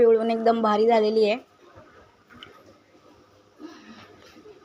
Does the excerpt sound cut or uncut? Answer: uncut